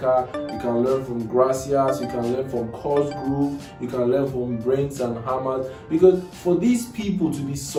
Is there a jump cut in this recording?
no; 0 cuts

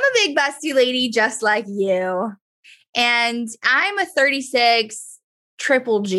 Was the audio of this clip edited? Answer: no; 0 cuts

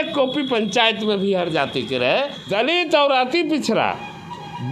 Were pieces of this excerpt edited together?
yes; 1 cut; at 2.4 s

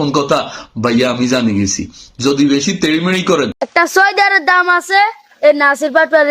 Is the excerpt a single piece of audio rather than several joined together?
no; 1 cut; at 3.6 s

